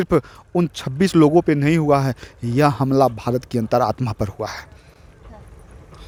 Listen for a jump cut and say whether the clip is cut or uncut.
uncut